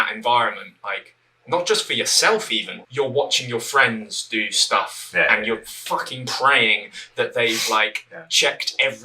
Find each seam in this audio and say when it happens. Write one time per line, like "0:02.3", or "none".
0:02.7

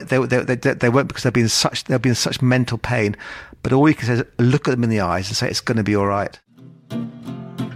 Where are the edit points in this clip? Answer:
0:06.5

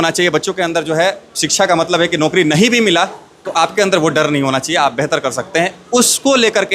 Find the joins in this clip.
none

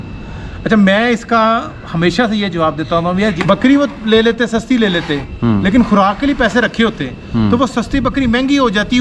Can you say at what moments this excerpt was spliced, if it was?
0:03.4

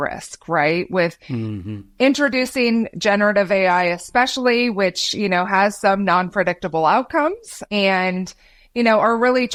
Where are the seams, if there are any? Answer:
none

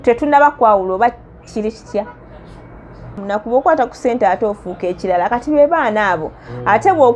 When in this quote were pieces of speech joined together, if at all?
0:03.2

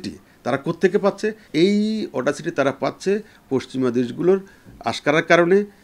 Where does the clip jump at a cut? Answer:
0:01.4

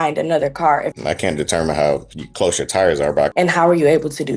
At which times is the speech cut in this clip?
0:00.9
0:03.3

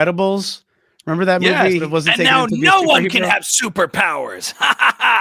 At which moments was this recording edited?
0:01.9

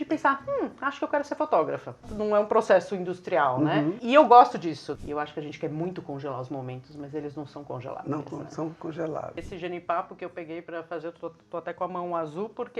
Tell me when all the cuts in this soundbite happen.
0:02.1
0:04.9
0:09.4

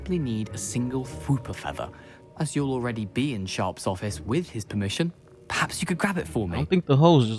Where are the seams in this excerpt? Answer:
none

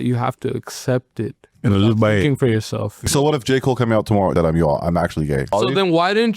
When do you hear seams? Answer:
0:03.1
0:04.3
0:05.5

